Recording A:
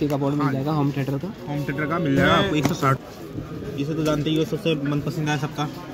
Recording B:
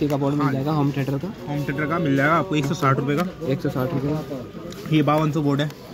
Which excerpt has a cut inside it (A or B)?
A